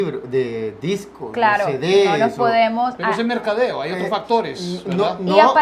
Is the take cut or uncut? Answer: cut